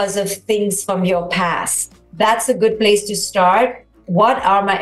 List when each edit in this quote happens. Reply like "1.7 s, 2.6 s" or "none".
1.9 s